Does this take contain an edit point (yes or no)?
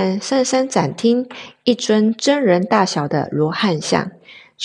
no